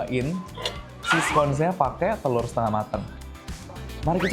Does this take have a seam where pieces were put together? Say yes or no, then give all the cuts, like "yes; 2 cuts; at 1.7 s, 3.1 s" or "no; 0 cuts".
no; 0 cuts